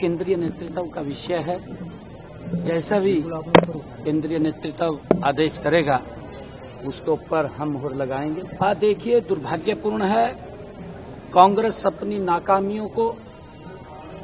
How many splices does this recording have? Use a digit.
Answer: 1